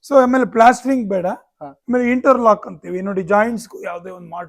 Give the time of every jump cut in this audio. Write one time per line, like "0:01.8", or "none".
none